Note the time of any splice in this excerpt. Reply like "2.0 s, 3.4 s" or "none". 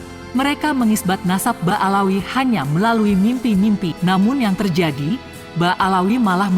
3.9 s

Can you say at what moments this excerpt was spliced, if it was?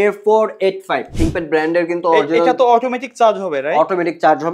1.1 s

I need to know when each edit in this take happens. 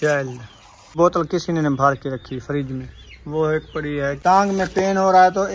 0.9 s, 4.2 s

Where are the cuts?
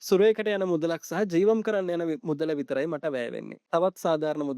3.6 s

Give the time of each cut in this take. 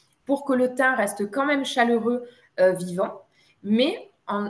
none

